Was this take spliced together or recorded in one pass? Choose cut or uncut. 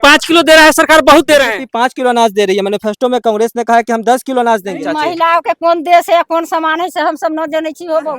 cut